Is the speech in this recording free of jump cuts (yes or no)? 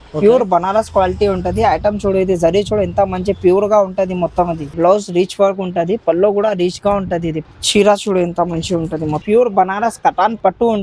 no